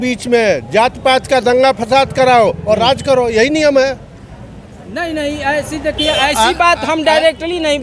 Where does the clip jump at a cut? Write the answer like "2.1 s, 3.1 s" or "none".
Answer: none